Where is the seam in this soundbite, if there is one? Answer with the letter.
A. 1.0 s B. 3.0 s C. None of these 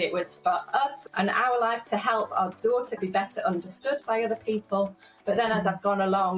B